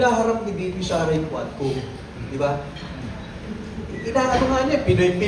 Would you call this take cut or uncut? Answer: uncut